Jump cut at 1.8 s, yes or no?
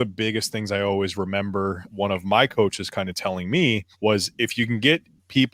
yes